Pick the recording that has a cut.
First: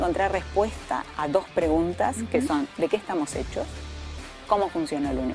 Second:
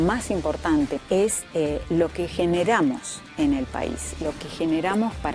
second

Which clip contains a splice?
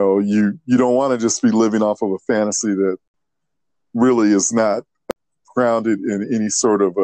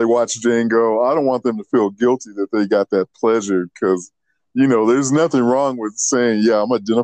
first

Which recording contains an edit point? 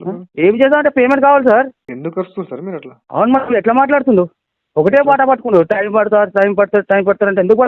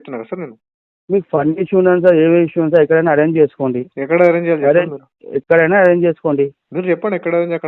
first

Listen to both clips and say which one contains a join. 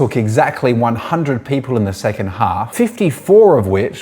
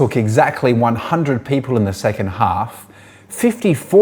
first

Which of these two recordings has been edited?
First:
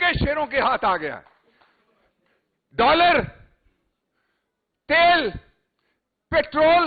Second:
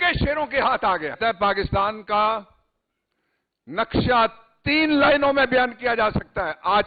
second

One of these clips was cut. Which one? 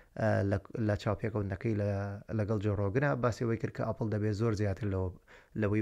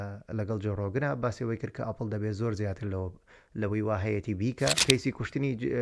second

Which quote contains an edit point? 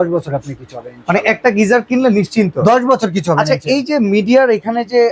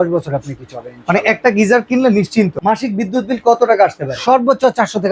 second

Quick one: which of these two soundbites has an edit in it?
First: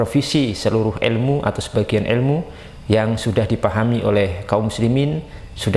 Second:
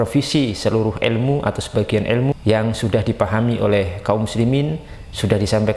second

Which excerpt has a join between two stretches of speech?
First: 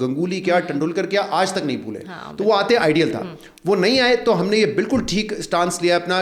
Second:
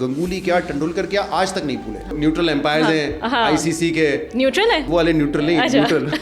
second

